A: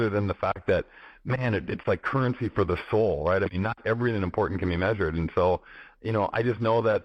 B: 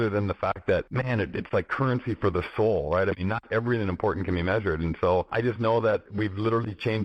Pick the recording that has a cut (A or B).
B